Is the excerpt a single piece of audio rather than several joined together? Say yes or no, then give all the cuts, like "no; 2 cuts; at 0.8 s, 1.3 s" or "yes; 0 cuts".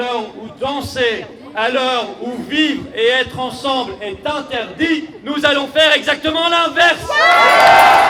yes; 0 cuts